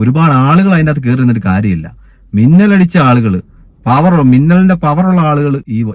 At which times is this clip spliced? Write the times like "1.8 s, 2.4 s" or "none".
none